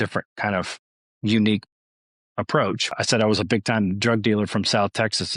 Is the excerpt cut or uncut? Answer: cut